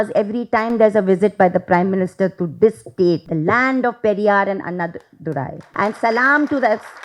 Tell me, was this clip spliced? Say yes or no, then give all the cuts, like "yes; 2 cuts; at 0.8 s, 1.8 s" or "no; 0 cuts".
yes; 2 cuts; at 3.3 s, 5.6 s